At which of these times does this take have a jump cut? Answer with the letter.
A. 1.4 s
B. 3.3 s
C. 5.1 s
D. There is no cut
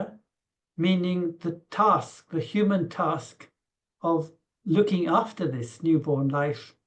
D